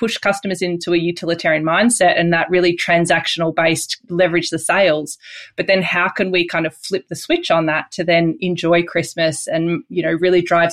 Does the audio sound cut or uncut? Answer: uncut